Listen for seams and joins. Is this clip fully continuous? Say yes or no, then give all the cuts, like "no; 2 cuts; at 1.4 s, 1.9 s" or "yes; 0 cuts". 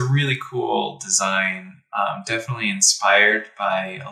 yes; 0 cuts